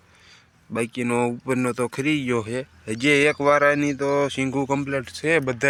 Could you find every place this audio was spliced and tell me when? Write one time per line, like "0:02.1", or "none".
none